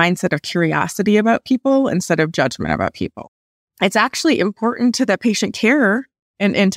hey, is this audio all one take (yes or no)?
no